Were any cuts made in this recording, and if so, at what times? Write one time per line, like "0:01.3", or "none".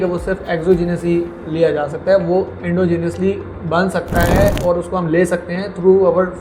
none